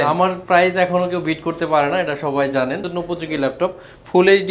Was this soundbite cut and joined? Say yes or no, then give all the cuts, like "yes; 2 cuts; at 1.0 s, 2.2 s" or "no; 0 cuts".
yes; 1 cut; at 2.9 s